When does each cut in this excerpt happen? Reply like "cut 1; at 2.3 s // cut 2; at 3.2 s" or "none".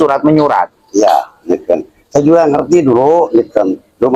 none